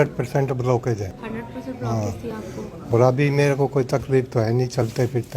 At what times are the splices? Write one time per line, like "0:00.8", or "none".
0:01.2